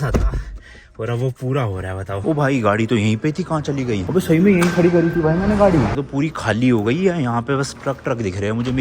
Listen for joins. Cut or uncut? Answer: cut